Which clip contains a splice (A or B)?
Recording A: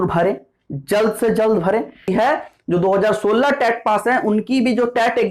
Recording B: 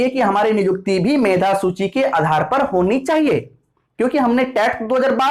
A